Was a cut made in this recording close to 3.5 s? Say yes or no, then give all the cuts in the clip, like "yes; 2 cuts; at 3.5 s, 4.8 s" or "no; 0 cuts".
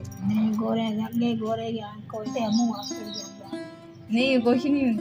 no; 1 cut; at 2.3 s